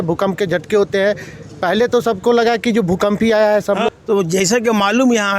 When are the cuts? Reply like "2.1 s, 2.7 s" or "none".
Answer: 3.9 s